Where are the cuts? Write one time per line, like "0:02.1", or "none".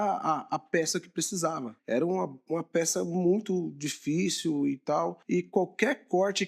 0:01.7
0:05.2